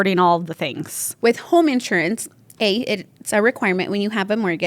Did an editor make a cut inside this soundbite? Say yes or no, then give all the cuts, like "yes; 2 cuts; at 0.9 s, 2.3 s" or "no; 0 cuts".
yes; 1 cut; at 1.0 s